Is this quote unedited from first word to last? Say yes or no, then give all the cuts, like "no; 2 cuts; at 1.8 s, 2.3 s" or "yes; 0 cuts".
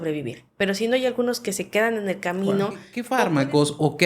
no; 1 cut; at 3.0 s